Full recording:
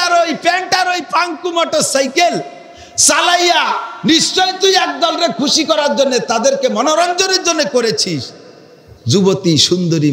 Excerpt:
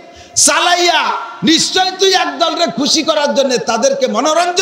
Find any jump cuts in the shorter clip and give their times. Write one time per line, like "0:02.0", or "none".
none